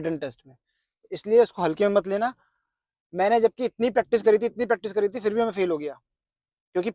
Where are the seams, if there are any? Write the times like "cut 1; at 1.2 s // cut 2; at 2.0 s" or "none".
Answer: none